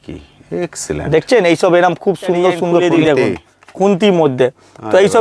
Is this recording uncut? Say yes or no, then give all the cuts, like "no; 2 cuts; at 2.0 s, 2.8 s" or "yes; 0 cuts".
no; 1 cut; at 2.8 s